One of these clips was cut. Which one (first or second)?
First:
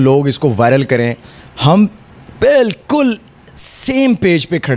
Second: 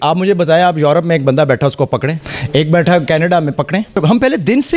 second